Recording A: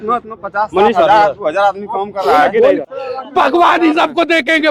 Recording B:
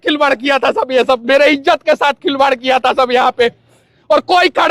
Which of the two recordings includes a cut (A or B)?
A